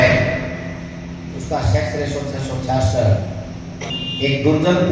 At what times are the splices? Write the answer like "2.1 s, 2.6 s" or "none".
3.9 s